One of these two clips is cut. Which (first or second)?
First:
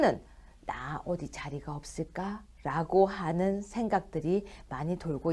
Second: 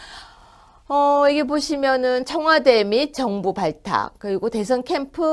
second